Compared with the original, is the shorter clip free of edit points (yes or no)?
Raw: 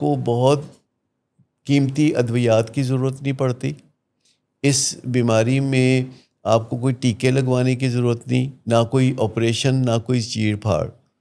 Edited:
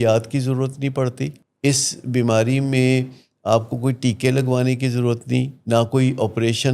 no